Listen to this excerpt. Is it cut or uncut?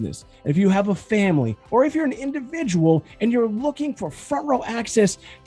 uncut